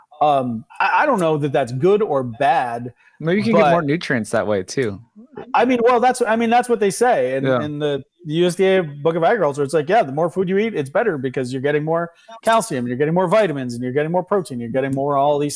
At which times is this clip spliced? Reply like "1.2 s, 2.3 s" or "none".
none